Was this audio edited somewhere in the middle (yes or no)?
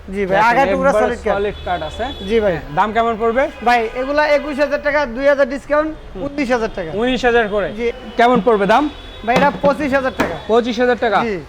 yes